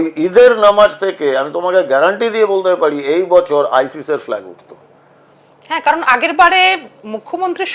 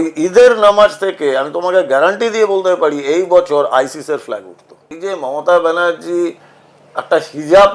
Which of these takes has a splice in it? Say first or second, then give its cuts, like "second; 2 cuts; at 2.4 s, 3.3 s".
second; 1 cut; at 4.9 s